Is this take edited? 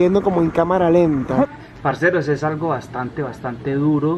yes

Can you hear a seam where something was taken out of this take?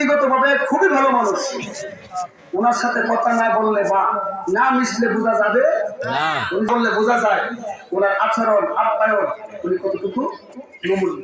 yes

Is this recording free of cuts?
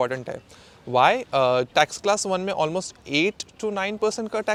yes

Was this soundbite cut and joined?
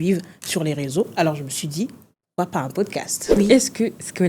yes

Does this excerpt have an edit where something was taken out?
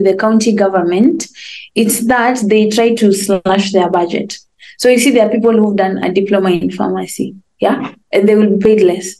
no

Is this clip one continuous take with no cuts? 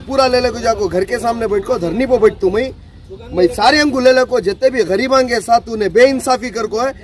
yes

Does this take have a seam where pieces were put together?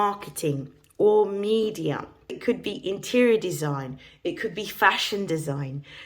yes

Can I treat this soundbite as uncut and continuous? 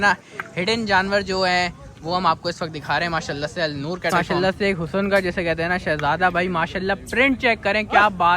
no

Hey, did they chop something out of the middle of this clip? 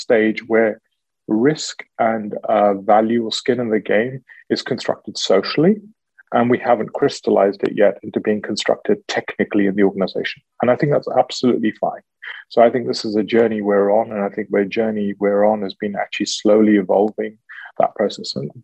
no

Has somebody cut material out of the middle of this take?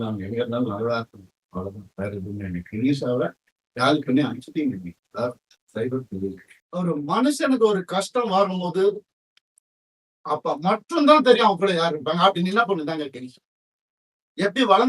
yes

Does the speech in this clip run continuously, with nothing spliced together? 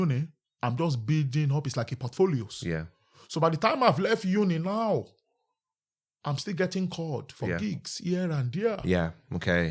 yes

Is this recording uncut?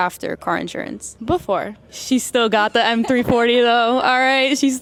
yes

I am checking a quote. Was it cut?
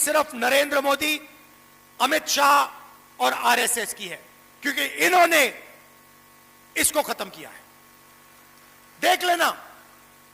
no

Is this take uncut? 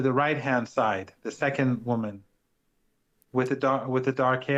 yes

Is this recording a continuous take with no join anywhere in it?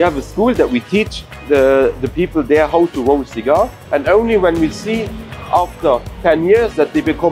no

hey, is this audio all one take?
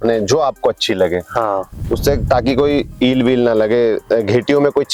yes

